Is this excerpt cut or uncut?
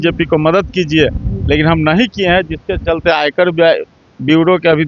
uncut